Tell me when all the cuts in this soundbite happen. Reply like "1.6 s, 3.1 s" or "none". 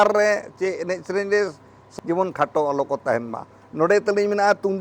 1.8 s